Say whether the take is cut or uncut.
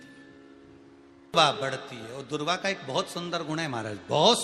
cut